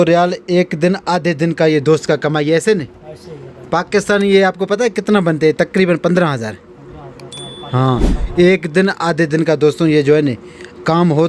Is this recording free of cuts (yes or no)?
yes